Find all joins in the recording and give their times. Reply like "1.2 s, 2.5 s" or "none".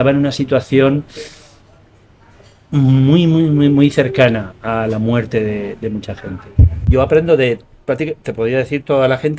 6.8 s